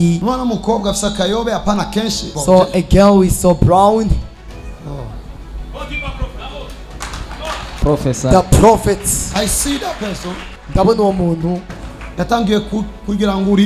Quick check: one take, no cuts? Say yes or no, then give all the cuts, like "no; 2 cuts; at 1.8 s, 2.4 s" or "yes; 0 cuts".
yes; 0 cuts